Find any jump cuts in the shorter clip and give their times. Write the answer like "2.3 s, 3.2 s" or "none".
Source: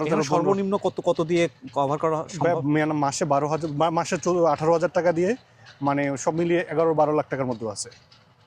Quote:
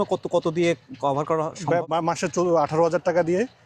1.9 s

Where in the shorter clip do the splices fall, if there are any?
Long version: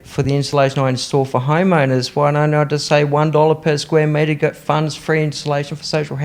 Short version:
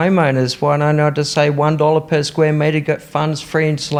none

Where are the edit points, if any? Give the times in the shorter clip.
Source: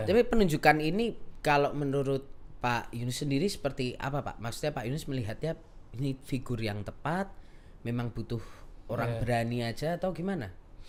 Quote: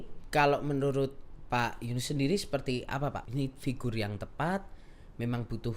3.2 s

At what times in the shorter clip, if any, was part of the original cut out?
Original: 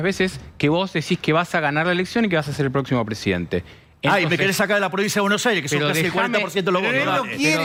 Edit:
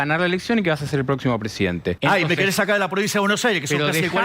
2.0 s

